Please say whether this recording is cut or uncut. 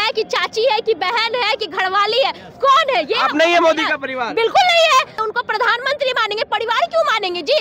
cut